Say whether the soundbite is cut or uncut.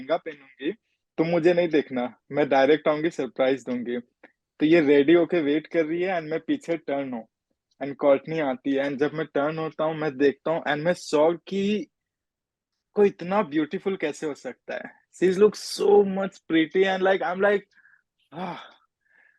cut